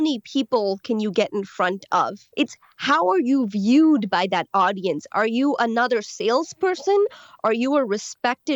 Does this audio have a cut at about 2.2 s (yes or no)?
yes